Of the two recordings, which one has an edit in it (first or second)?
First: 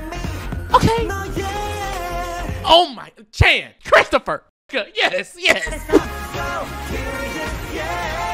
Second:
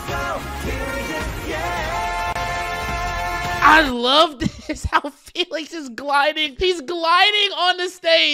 first